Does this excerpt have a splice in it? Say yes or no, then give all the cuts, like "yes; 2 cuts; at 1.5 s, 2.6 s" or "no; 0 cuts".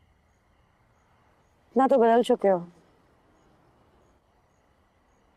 no; 0 cuts